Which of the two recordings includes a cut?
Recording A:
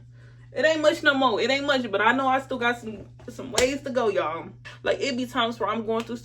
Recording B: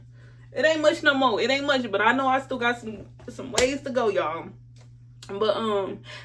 A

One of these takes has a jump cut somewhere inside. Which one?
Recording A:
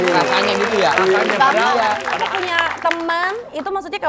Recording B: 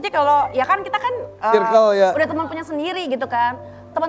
A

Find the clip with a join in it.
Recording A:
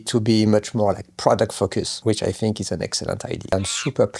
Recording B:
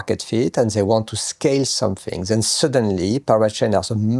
A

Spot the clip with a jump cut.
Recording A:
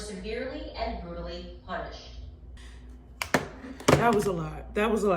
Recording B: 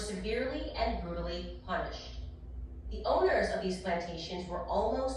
A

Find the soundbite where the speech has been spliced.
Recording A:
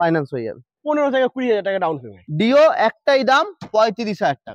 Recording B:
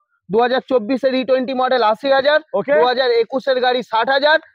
A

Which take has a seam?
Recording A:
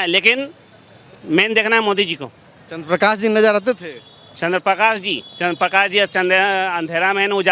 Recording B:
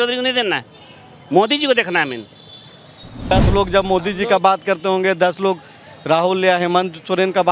B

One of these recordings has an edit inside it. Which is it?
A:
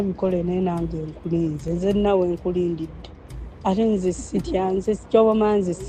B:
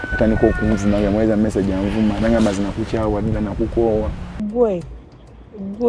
B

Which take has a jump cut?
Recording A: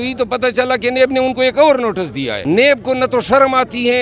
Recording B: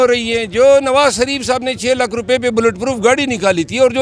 A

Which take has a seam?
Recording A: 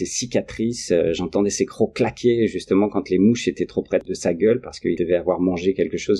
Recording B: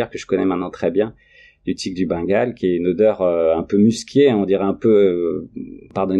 A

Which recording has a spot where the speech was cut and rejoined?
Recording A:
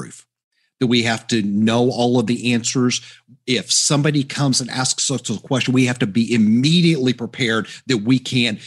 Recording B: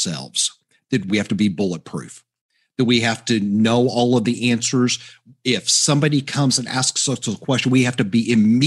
B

